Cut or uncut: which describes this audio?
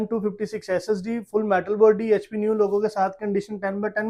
uncut